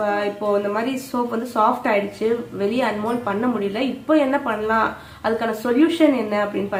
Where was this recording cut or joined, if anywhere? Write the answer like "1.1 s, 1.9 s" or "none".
none